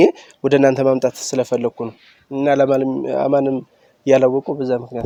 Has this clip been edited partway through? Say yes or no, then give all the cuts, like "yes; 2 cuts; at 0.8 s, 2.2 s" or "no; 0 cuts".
no; 0 cuts